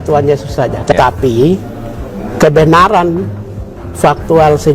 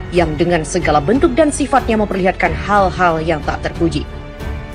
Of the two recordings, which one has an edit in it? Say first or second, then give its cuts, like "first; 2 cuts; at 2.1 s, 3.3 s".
first; 1 cut; at 0.9 s